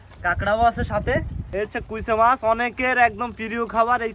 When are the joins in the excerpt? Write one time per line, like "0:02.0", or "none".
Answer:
0:01.4